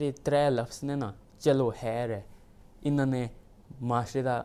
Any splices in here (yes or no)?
no